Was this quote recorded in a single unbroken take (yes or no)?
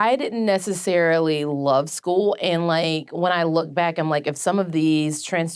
yes